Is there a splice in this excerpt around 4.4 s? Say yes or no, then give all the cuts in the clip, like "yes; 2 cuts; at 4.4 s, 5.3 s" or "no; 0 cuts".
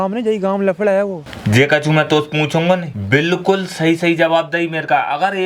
no; 2 cuts; at 1.3 s, 2.9 s